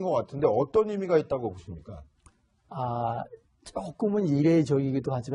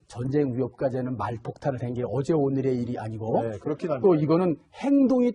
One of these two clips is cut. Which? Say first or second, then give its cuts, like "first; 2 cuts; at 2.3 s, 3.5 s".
first; 1 cut; at 2.2 s